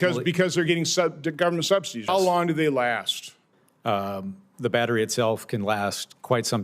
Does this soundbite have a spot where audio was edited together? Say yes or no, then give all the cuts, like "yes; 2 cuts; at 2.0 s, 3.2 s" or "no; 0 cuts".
yes; 1 cut; at 2.1 s